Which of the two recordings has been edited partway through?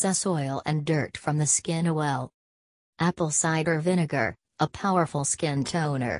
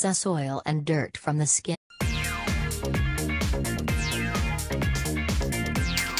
first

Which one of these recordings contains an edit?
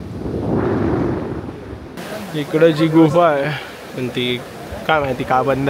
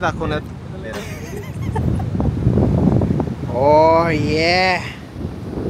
first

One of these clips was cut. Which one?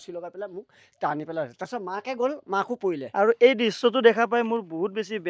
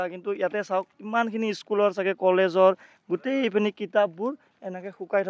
first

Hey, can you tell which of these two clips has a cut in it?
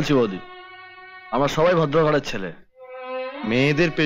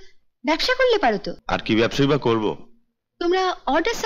second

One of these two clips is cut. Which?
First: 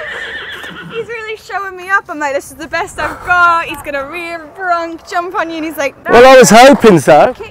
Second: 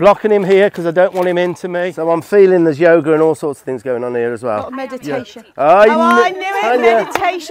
second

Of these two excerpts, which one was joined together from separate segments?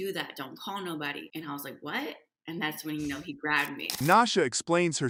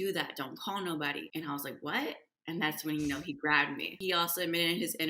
second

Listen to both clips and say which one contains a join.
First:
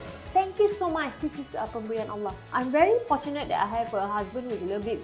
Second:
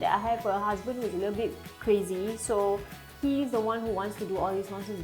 first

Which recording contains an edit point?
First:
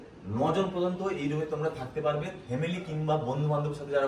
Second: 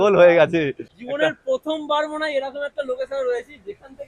second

